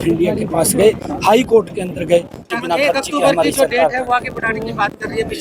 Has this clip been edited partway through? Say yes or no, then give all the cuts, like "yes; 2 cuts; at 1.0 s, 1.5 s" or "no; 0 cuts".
yes; 1 cut; at 2.4 s